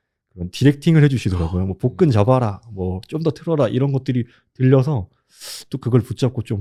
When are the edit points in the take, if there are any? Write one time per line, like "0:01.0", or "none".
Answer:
none